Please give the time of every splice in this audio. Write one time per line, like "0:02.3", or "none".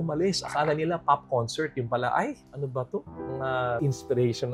none